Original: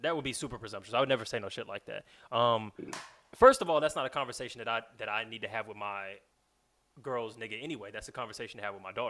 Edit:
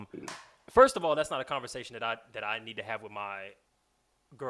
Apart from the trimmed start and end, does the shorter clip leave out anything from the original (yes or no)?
no